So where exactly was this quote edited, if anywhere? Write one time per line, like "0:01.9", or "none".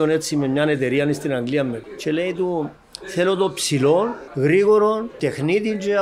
0:01.9
0:04.2
0:05.2